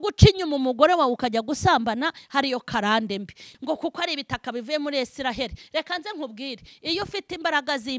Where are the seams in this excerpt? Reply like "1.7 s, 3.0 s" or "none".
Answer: 3.5 s